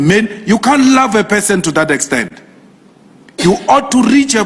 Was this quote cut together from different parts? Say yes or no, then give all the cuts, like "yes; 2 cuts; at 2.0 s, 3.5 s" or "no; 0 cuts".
no; 0 cuts